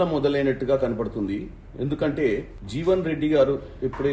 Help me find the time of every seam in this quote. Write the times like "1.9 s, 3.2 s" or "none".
2.6 s